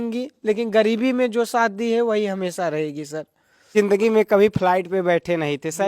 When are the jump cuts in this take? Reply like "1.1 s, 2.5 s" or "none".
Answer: 3.7 s